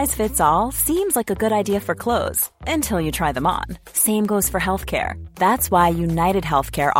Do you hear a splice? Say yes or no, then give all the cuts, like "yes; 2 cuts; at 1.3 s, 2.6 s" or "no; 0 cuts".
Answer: no; 0 cuts